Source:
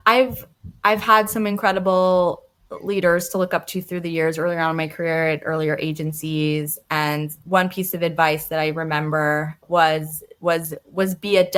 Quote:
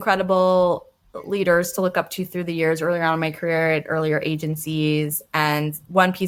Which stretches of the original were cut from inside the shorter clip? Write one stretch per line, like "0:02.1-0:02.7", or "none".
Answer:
none

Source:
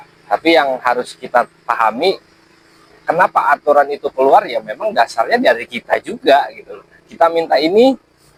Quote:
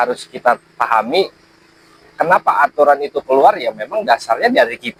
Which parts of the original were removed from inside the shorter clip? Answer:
none

